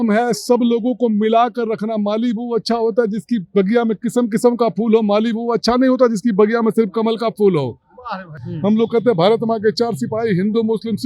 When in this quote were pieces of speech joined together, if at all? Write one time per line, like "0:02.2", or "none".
0:08.4